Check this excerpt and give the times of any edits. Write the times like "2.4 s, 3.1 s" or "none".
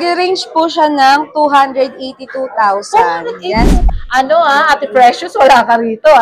3.8 s

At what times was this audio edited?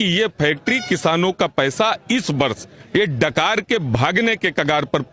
none

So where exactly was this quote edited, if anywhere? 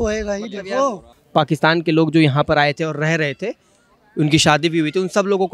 1.1 s

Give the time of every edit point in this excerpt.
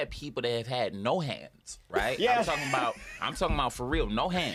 none

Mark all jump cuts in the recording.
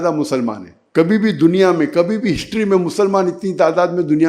none

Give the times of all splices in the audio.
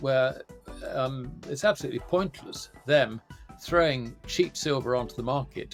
none

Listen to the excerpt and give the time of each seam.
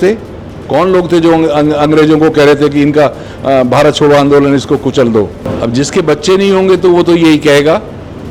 5.5 s

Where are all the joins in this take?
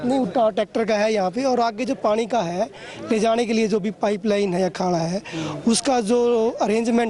none

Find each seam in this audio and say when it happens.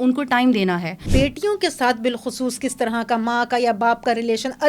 1.0 s

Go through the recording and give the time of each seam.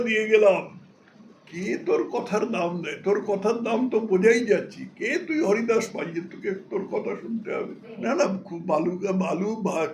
7.9 s

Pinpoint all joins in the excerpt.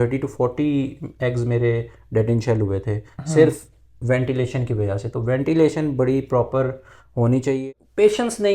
7.5 s

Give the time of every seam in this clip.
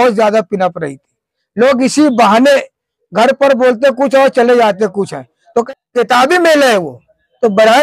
5.6 s

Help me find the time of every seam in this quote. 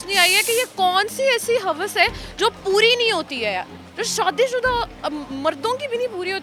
none

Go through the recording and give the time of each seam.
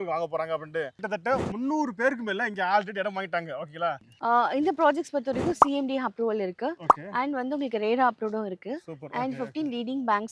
4.1 s

